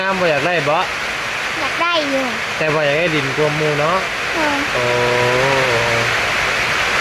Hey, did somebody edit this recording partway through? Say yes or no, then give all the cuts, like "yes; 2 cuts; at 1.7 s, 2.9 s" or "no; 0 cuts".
no; 0 cuts